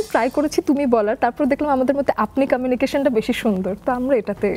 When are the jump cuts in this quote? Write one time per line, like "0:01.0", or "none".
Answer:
none